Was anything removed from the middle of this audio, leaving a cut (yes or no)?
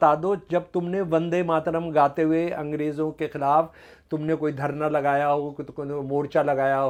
no